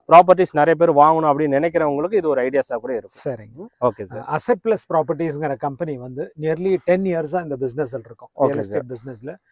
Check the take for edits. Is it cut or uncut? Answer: uncut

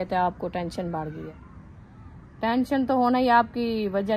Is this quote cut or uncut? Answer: cut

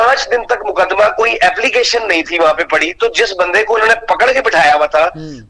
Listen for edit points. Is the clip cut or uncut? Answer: uncut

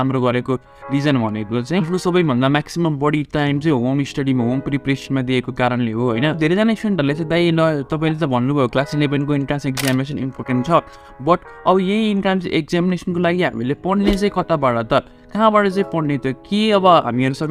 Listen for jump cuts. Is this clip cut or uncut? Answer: uncut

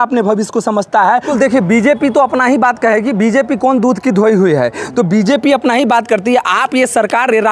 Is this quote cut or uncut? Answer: cut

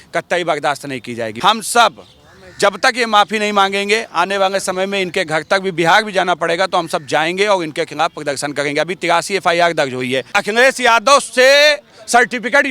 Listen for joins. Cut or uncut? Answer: cut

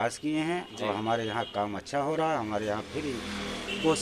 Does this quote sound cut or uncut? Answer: uncut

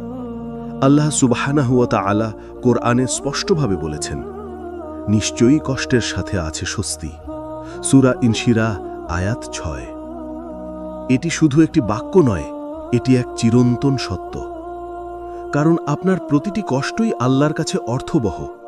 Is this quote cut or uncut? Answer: uncut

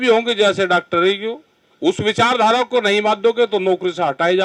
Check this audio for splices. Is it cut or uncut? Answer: uncut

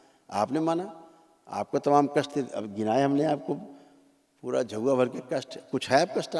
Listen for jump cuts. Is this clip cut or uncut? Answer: uncut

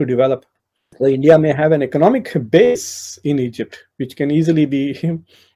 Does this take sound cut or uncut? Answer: uncut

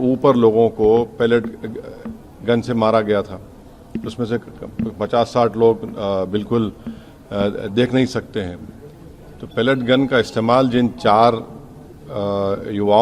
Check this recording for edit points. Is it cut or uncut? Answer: uncut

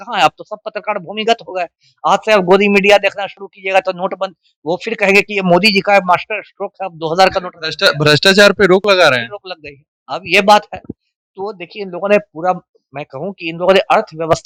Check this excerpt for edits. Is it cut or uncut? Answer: uncut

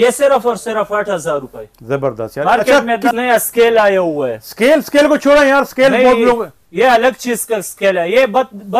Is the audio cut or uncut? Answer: cut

